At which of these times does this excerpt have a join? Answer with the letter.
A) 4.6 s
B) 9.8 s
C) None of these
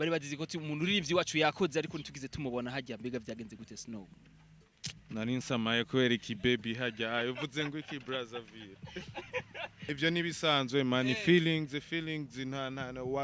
B